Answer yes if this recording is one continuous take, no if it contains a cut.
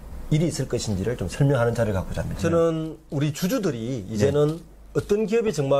no